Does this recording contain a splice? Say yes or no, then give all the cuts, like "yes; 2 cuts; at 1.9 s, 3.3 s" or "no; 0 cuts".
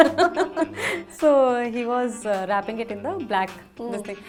no; 0 cuts